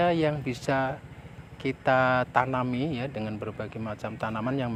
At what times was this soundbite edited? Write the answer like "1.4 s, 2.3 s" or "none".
none